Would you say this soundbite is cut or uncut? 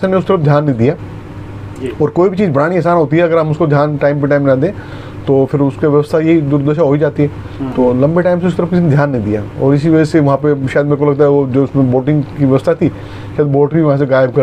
uncut